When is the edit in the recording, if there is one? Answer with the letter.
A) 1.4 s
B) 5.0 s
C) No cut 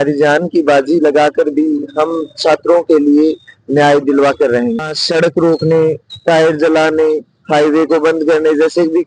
B